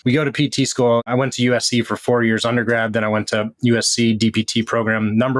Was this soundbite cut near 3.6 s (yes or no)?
no